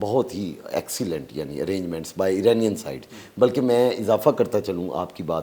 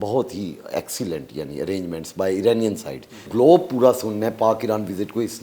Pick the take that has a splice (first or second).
second